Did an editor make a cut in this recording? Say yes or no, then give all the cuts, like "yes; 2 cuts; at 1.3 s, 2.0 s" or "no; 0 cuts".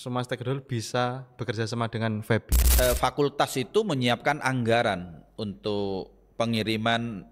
yes; 1 cut; at 2.6 s